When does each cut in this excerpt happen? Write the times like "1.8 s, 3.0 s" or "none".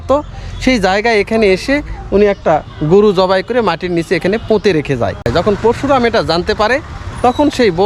5.3 s